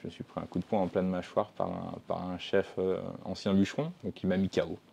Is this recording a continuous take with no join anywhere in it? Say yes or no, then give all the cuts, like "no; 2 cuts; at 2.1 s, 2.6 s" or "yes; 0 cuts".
no; 1 cut; at 4.0 s